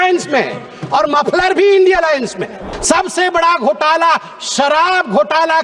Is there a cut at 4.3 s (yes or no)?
no